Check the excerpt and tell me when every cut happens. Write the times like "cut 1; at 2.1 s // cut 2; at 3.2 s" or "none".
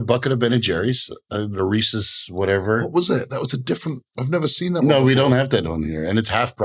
none

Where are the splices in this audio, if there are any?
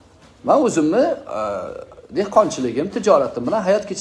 none

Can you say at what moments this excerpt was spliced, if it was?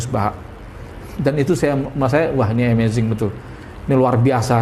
none

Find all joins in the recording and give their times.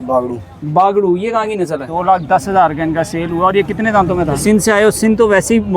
cut 1; at 1.9 s // cut 2; at 4.4 s

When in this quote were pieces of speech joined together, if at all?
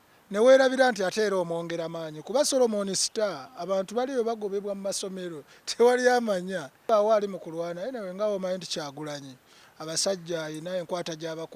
cut 1; at 6.8 s

